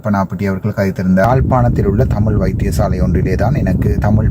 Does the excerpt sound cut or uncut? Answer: cut